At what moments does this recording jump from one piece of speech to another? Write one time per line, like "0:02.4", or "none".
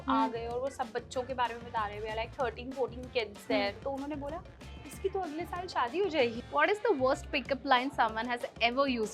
0:03.8
0:06.4